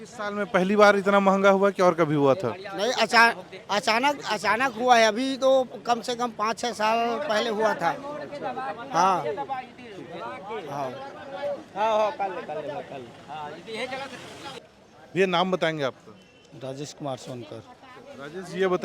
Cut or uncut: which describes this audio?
uncut